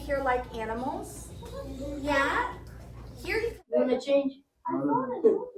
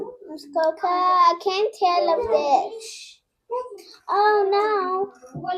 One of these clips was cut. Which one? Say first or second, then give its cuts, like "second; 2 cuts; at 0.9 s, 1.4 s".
first; 1 cut; at 3.7 s